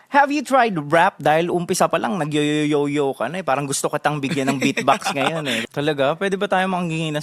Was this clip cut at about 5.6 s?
yes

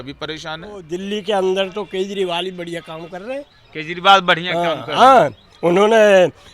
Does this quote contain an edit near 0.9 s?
yes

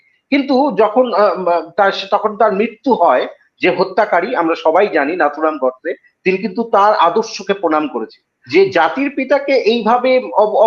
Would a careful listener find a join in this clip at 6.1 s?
no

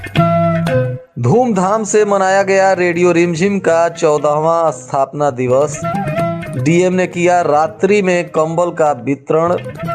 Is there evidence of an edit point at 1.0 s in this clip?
yes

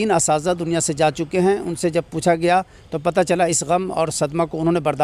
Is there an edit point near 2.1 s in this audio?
no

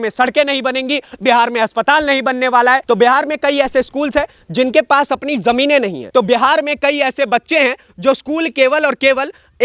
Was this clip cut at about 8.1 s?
no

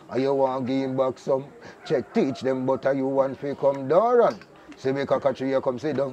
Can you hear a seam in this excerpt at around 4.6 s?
no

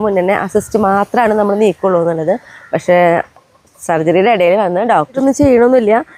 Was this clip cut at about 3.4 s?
no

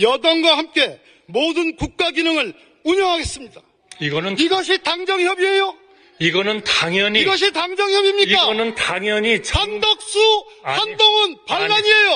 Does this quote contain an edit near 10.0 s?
no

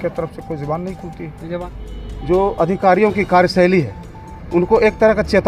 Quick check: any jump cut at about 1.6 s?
yes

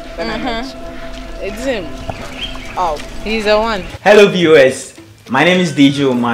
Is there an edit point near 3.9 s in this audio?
yes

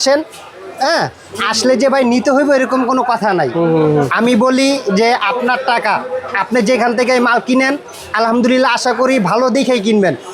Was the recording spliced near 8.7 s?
no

